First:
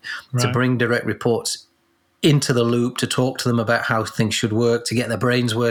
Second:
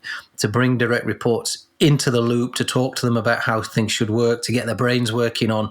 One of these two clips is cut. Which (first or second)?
second